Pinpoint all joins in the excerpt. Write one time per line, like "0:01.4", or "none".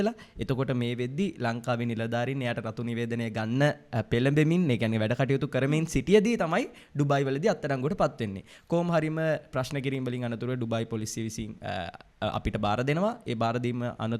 none